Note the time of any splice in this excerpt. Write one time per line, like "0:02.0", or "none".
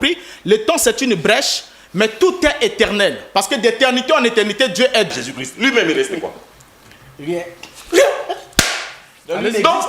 0:05.1